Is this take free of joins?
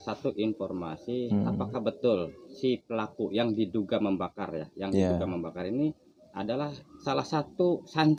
yes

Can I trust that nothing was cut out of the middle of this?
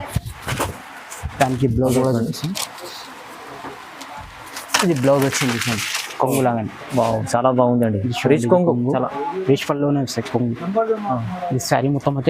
no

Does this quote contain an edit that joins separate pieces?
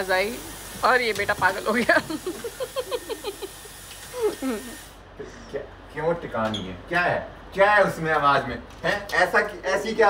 no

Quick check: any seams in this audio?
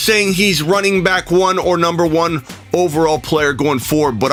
no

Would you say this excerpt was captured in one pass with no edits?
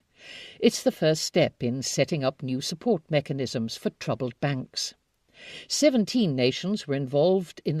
no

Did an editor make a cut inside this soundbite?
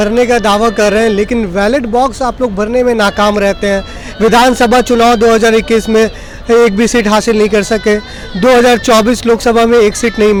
no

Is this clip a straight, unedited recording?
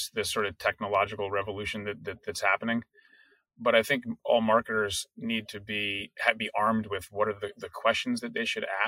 yes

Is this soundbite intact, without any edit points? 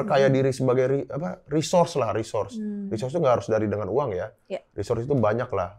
yes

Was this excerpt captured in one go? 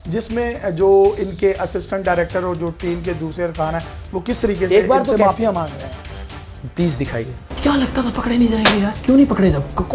no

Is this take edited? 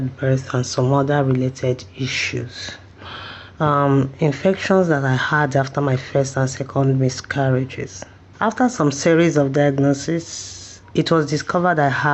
no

